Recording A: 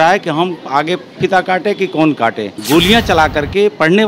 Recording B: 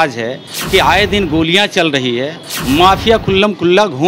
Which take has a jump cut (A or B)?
A